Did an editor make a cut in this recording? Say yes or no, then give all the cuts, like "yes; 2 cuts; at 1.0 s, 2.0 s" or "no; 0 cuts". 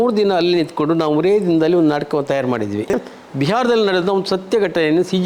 yes; 1 cut; at 3.0 s